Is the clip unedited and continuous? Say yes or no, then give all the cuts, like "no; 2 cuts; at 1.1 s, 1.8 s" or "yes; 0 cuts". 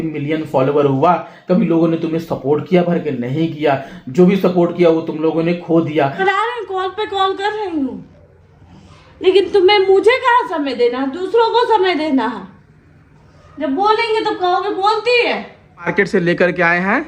no; 2 cuts; at 6.2 s, 15.9 s